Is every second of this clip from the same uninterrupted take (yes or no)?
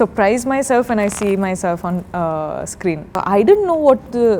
no